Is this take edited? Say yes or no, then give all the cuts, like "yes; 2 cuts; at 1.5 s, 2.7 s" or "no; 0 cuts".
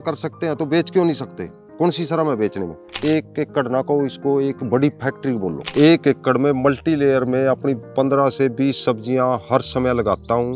yes; 2 cuts; at 3.0 s, 5.6 s